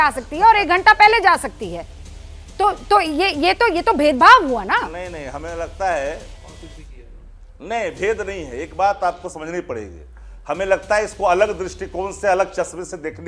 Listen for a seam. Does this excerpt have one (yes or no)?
no